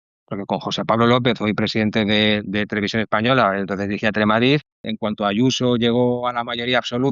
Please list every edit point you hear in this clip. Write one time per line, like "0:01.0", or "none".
0:04.9